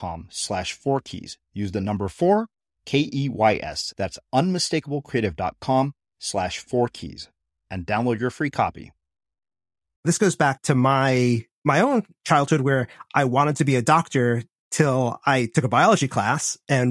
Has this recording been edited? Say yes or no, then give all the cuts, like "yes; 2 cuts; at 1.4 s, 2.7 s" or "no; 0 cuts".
yes; 1 cut; at 10.0 s